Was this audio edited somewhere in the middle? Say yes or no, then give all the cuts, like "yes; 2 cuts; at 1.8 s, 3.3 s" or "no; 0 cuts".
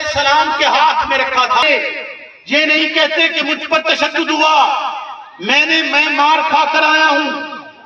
yes; 1 cut; at 1.6 s